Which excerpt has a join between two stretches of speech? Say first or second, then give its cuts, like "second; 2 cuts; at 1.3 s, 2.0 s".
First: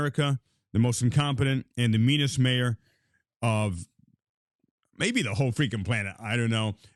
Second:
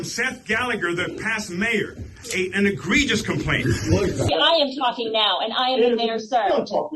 second; 1 cut; at 4.3 s